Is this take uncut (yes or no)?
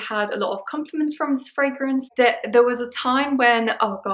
no